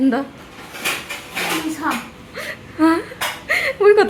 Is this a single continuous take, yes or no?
yes